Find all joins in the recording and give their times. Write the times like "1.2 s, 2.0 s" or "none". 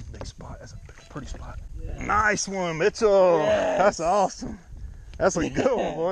1.7 s